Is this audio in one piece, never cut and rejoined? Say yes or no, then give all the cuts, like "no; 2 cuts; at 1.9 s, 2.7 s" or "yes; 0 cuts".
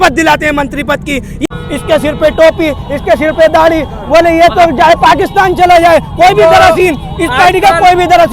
no; 1 cut; at 1.5 s